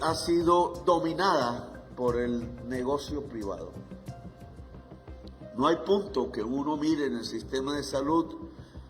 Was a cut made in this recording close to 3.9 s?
no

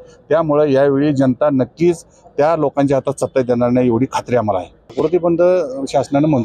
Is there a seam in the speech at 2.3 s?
no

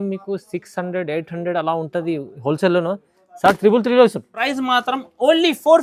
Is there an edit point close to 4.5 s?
yes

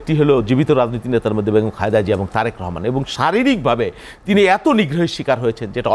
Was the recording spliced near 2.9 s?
no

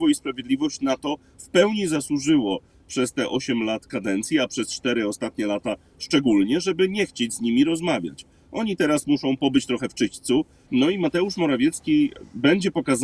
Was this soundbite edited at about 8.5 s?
no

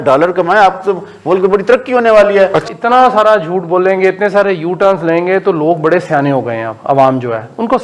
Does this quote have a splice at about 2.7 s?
yes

